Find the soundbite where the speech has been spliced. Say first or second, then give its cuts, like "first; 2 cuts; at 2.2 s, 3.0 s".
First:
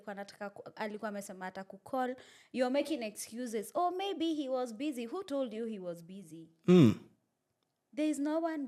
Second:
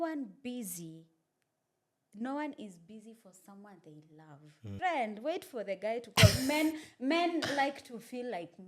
second; 1 cut; at 4.7 s